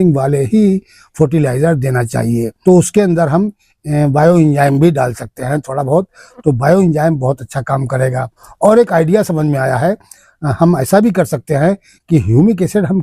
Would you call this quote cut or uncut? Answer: cut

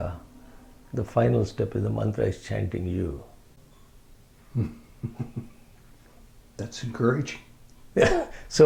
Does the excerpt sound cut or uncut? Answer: uncut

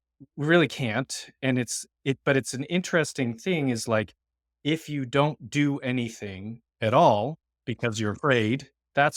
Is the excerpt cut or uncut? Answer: uncut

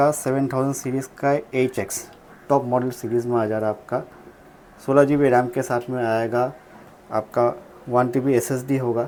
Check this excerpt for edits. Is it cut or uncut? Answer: uncut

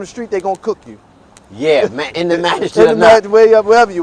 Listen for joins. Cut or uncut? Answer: uncut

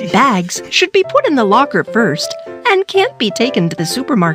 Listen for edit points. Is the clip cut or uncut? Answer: uncut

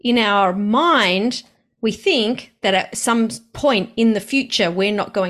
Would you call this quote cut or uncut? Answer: uncut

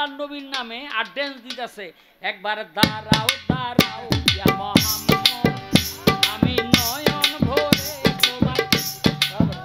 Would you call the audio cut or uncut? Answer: uncut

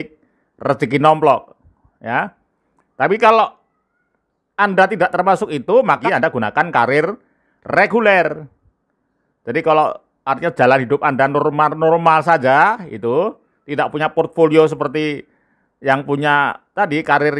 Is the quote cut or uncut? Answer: cut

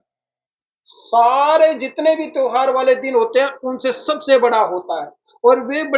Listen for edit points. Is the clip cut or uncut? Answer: uncut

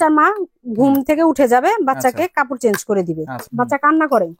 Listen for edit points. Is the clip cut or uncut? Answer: cut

